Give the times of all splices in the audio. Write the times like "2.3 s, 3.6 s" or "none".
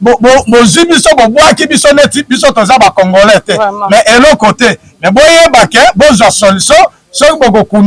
none